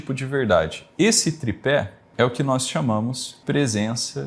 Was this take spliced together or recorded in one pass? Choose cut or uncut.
cut